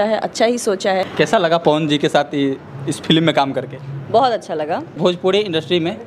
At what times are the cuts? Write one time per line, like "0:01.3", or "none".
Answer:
0:01.1
0:05.0